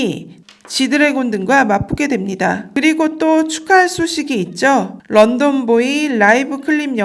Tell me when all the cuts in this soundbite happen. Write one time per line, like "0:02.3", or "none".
0:02.6